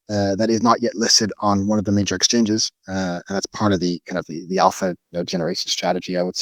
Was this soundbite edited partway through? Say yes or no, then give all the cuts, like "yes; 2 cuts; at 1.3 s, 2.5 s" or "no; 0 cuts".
no; 0 cuts